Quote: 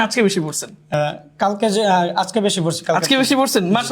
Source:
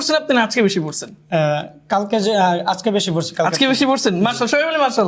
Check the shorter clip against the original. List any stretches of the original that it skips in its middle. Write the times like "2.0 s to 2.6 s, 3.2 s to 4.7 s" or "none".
1.3 s to 1.4 s

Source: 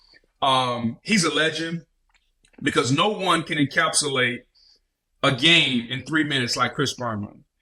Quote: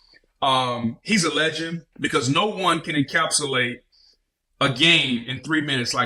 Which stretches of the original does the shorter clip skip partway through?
1.8 s to 2.5 s

